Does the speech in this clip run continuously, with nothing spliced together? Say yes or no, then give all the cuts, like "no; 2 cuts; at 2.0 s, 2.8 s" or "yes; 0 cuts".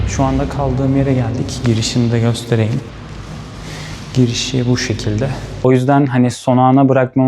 no; 1 cut; at 5.6 s